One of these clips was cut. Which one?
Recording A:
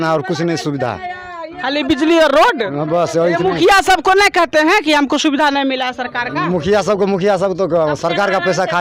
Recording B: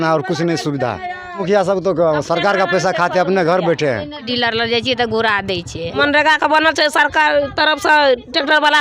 B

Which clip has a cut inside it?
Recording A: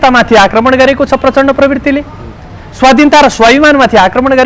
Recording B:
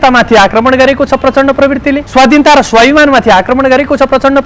B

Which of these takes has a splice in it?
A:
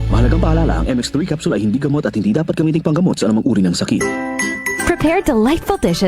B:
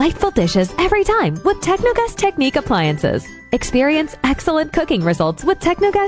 A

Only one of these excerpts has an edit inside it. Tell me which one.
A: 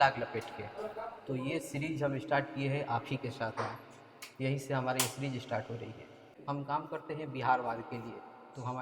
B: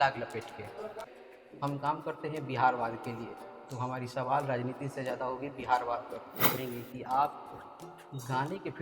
B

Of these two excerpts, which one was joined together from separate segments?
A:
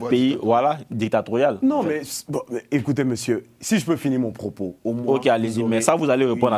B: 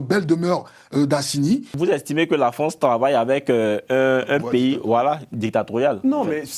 B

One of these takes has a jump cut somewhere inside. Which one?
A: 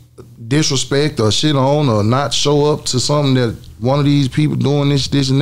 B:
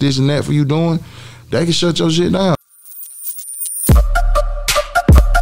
B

